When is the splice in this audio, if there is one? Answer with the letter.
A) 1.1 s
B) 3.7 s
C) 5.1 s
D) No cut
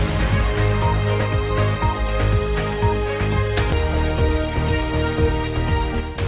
D